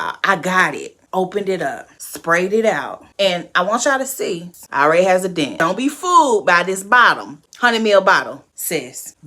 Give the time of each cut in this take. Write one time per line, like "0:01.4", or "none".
0:04.5
0:05.5